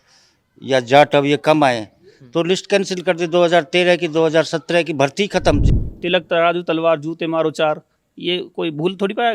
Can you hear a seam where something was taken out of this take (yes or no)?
yes